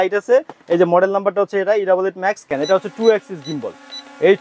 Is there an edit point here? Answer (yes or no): yes